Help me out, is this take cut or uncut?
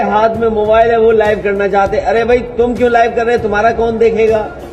uncut